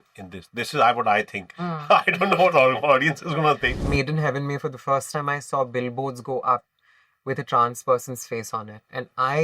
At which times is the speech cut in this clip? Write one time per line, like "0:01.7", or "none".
0:03.7